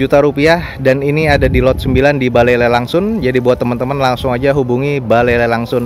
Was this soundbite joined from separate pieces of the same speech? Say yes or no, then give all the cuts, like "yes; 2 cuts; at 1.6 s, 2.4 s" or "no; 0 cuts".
no; 0 cuts